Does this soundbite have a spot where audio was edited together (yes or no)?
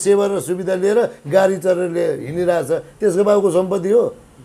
no